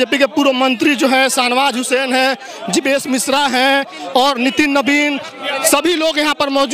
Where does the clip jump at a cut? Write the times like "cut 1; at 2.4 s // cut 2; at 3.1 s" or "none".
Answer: none